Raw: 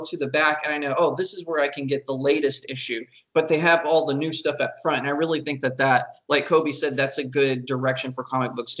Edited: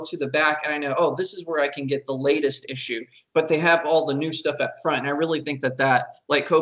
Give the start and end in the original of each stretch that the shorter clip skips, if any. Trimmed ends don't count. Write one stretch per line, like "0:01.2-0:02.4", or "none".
none